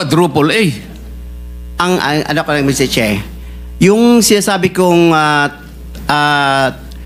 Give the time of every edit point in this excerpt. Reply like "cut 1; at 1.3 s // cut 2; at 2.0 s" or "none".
none

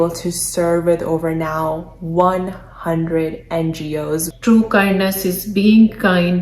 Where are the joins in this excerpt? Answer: cut 1; at 4.3 s

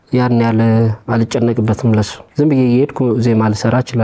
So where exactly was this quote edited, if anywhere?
cut 1; at 2.2 s

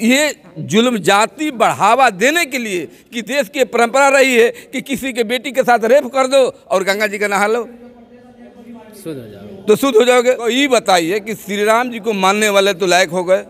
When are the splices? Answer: cut 1; at 10.5 s

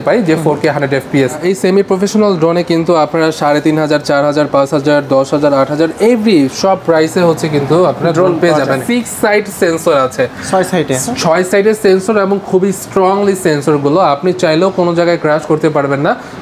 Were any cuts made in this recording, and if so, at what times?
cut 1; at 1.4 s // cut 2; at 8.8 s

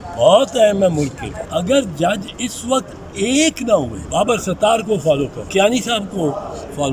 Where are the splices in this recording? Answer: cut 1; at 1.3 s // cut 2; at 4.0 s // cut 3; at 5.4 s

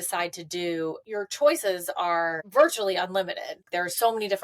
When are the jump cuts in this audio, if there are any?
cut 1; at 1.0 s // cut 2; at 2.4 s // cut 3; at 3.7 s

